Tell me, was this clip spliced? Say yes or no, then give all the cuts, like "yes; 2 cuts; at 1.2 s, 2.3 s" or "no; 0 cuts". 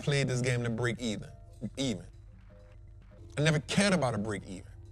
no; 0 cuts